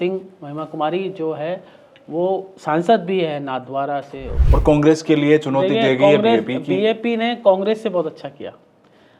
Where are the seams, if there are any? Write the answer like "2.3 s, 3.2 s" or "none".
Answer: 4.3 s